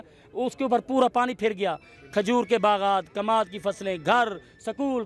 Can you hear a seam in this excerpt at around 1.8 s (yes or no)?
no